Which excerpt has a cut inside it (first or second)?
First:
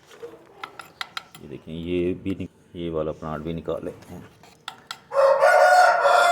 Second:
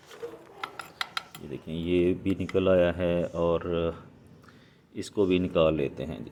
first